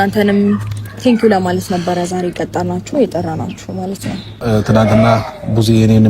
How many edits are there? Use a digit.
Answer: 1